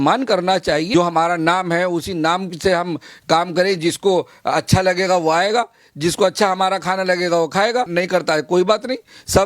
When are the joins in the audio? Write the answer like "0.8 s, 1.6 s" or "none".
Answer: 0.9 s, 7.9 s

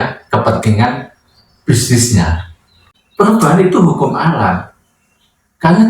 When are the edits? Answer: 2.8 s

